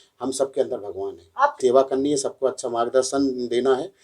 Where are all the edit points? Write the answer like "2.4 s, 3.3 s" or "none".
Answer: 1.6 s